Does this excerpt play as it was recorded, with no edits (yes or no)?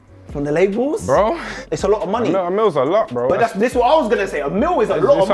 no